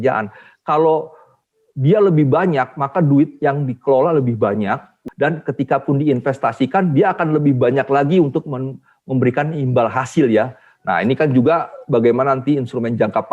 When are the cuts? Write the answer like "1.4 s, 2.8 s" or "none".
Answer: 5.0 s